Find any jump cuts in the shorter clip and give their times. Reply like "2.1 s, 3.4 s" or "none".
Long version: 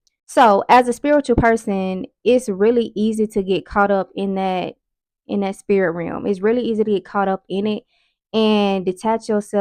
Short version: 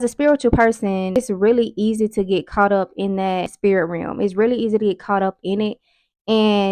1.2 s, 3.5 s